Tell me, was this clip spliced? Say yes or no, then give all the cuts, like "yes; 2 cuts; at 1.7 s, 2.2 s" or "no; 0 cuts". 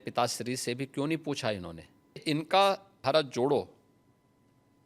yes; 2 cuts; at 2.2 s, 2.9 s